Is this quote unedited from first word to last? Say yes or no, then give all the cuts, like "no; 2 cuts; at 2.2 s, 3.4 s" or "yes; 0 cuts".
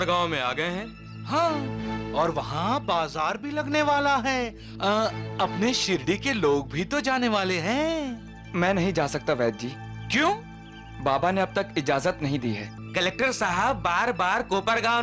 no; 1 cut; at 12.7 s